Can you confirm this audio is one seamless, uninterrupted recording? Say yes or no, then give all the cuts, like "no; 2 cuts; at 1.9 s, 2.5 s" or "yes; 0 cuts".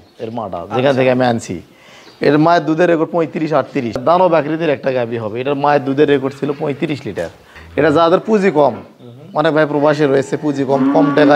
no; 2 cuts; at 4.0 s, 7.6 s